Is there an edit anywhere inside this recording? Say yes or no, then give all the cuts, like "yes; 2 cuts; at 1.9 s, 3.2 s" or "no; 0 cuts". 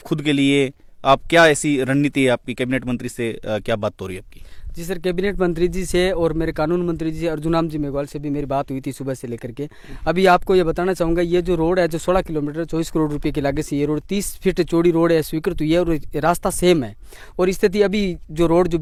no; 0 cuts